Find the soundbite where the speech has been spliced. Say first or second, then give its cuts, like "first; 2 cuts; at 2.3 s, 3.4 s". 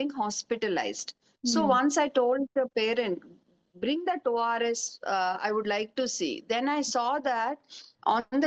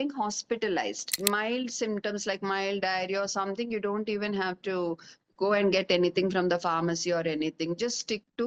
second; 1 cut; at 1.2 s